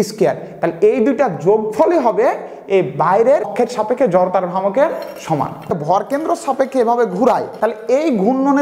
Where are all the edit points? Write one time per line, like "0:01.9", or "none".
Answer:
0:03.5
0:05.7
0:07.5